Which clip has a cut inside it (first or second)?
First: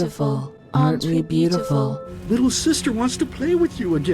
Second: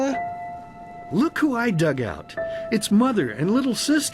first